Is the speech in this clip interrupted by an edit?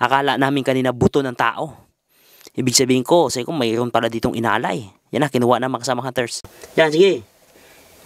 yes; 1 cut; at 6.3 s

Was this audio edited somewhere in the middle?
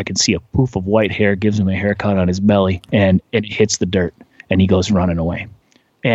yes; 1 cut; at 2.8 s

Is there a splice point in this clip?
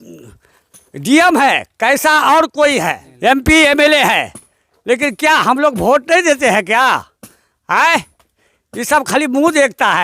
no; 0 cuts

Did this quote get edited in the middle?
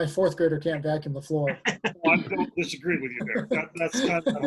no; 0 cuts

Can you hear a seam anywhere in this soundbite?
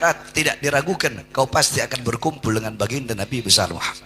no; 0 cuts

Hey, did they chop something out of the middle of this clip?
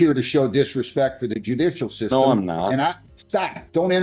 no; 0 cuts

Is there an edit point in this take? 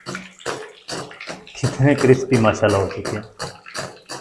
no; 0 cuts

